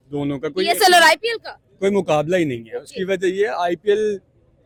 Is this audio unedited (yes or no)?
yes